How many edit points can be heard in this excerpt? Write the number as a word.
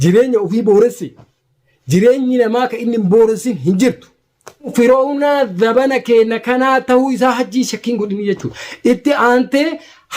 one